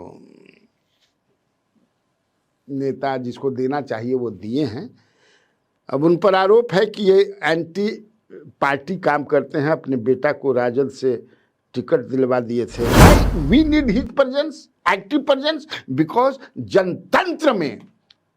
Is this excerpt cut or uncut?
cut